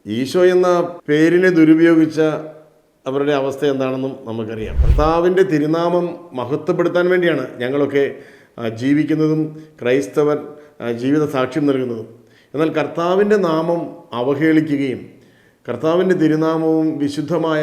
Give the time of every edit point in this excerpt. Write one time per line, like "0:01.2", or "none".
0:01.0
0:04.8